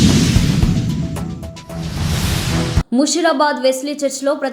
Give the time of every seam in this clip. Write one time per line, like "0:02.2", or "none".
0:02.8